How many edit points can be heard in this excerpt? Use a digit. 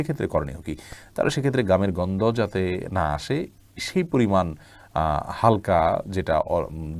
0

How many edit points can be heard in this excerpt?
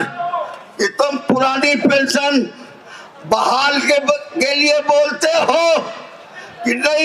0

